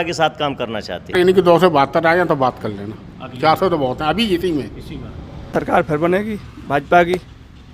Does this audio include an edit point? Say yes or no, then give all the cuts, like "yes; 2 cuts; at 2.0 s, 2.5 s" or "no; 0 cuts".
yes; 2 cuts; at 1.1 s, 5.5 s